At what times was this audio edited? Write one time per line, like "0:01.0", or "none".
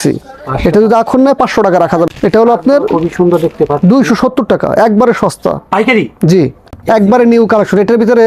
0:02.1
0:06.7